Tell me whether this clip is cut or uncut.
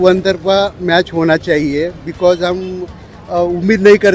uncut